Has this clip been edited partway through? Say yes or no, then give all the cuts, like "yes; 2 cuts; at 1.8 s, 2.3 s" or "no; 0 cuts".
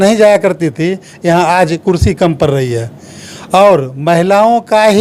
no; 0 cuts